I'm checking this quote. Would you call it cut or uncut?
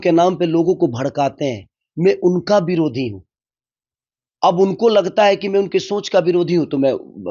uncut